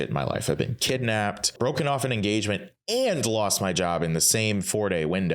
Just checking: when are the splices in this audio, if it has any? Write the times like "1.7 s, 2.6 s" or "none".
1.5 s